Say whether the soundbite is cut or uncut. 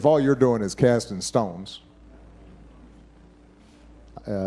uncut